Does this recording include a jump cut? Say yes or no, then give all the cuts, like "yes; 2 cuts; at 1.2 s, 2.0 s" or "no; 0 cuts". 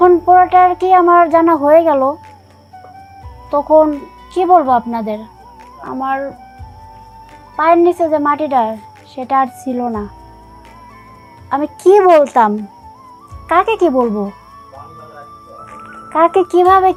no; 0 cuts